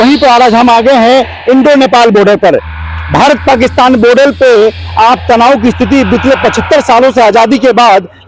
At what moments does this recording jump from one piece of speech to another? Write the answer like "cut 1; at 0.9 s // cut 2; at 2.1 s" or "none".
none